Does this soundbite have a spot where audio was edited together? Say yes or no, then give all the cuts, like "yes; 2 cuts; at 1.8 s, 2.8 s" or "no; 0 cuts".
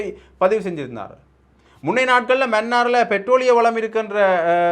no; 0 cuts